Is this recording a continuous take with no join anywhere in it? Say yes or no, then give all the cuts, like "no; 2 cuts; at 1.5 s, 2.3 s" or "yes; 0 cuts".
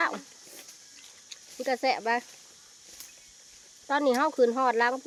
yes; 0 cuts